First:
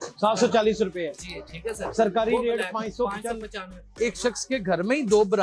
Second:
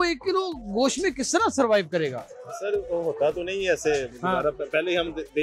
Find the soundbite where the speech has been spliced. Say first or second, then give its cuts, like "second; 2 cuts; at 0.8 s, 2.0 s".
first; 1 cut; at 3.9 s